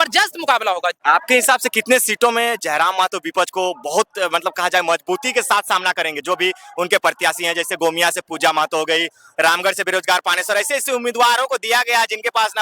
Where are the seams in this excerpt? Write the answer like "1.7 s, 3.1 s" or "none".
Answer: 1.0 s

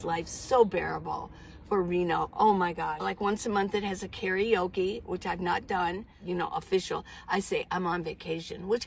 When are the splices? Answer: 3.0 s, 6.1 s

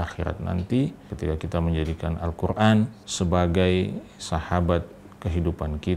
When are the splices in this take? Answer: 1.1 s, 3.0 s

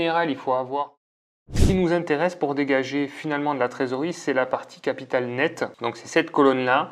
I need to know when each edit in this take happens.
1.6 s

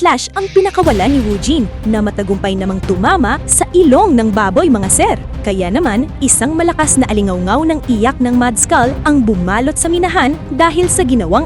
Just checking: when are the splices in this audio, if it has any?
none

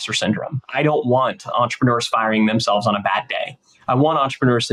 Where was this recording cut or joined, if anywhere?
none

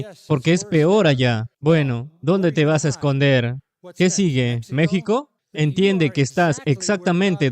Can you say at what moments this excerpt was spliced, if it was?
1.5 s, 5.4 s

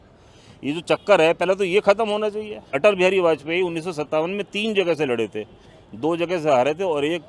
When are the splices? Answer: 2.7 s

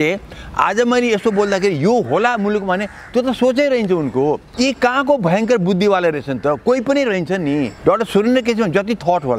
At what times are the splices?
4.5 s, 7.7 s

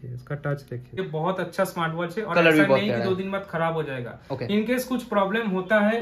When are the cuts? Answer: 1.0 s

